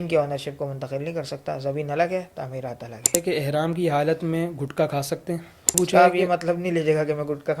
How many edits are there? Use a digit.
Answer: 2